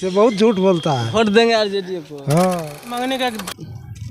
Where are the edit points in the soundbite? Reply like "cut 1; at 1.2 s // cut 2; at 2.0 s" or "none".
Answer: cut 1; at 2.9 s